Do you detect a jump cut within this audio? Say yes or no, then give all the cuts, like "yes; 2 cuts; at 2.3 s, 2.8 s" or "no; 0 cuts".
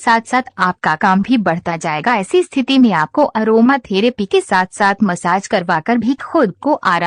no; 0 cuts